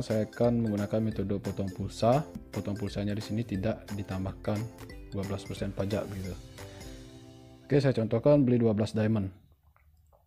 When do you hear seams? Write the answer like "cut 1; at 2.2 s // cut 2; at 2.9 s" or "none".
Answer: cut 1; at 2.4 s